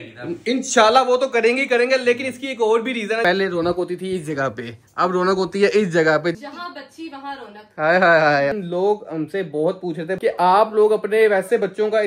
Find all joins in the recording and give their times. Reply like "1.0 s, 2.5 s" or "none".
3.2 s, 6.4 s, 8.5 s, 10.1 s